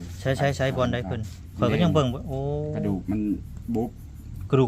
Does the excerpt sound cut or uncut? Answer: uncut